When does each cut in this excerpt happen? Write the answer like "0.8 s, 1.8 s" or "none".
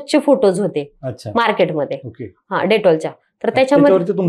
none